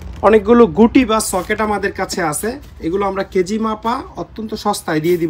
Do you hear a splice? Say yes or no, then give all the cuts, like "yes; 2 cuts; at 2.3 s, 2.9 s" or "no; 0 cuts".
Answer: no; 0 cuts